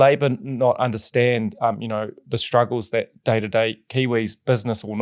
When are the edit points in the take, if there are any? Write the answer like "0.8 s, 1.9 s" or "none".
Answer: none